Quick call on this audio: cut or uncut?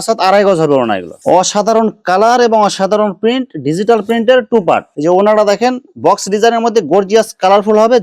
cut